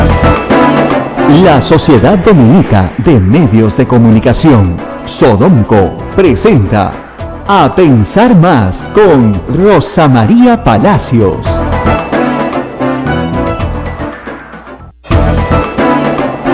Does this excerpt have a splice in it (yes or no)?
yes